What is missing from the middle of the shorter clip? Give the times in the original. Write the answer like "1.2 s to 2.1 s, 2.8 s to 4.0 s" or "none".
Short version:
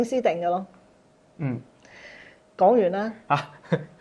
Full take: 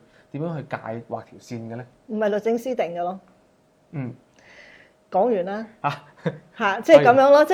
none

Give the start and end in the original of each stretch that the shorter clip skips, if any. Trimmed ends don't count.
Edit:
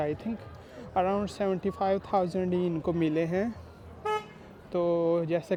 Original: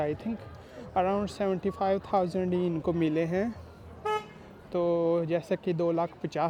none

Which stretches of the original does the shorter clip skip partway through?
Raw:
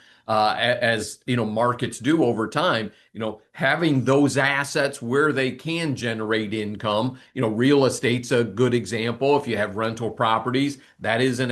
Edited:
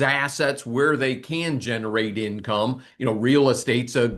none

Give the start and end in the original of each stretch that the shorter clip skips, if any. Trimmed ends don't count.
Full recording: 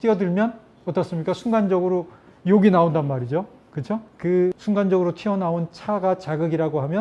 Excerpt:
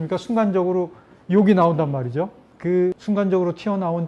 3.6 s to 4.1 s

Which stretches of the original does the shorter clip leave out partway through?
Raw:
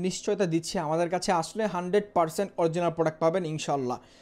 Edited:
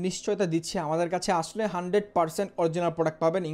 none

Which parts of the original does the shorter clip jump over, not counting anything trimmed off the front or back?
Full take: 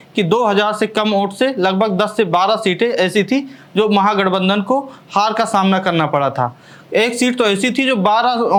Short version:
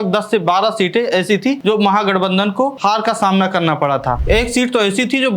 3.4 s to 3.7 s, 4.9 s to 5.1 s, 6.5 s to 6.9 s

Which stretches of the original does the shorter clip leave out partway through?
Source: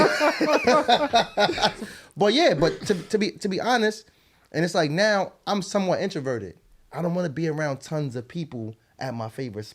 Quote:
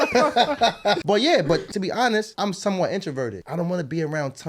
1.5 s to 2.1 s, 3.3 s to 5.3 s, 6.5 s to 6.9 s

